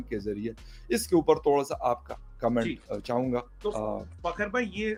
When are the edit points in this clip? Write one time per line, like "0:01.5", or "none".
none